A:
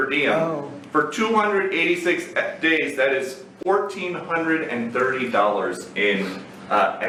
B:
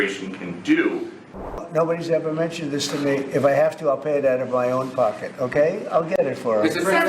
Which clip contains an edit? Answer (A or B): B